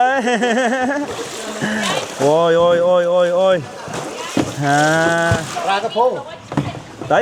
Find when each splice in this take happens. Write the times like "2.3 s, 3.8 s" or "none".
none